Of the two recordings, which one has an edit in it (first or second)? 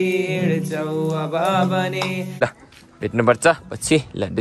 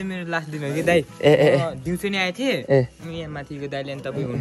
first